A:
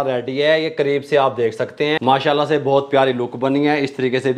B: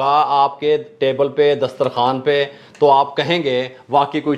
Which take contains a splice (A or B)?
A